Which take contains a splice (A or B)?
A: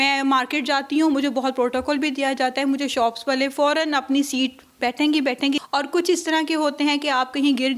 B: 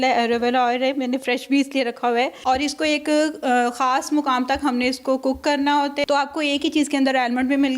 B